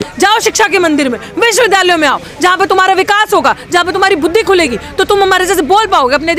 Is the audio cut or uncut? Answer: uncut